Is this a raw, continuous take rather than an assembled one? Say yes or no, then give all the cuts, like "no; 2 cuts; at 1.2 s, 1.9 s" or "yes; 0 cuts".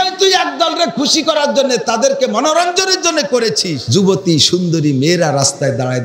no; 1 cut; at 3.8 s